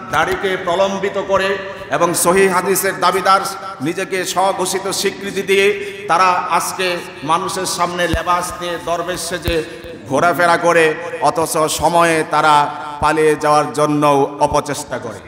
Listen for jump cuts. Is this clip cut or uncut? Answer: uncut